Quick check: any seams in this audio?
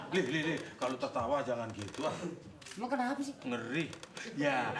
no; 0 cuts

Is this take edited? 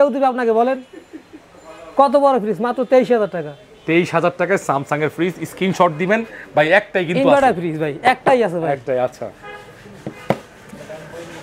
no; 0 cuts

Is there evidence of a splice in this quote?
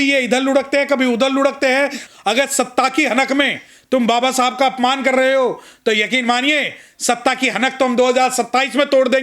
yes; 1 cut; at 2.0 s

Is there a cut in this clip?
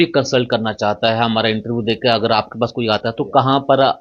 no; 0 cuts

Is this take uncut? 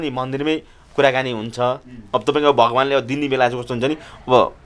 yes; 0 cuts

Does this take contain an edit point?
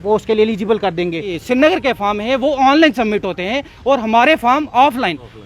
yes; 1 cut; at 1.3 s

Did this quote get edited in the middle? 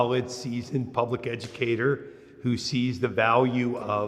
no; 0 cuts

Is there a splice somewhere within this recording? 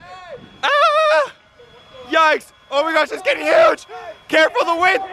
no; 0 cuts

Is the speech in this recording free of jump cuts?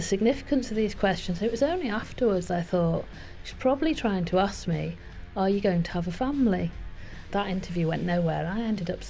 no; 1 cut; at 7.2 s

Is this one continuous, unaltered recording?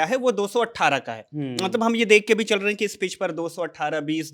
yes; 0 cuts

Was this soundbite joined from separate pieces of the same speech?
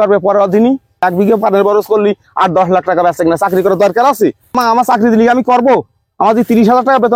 yes; 2 cuts; at 1.0 s, 4.6 s

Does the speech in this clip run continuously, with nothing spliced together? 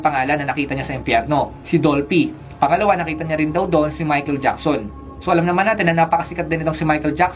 yes; 0 cuts

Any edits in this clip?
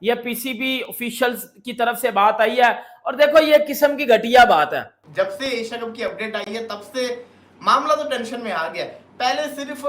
yes; 1 cut; at 5.0 s

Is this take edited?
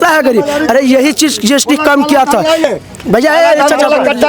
no; 0 cuts

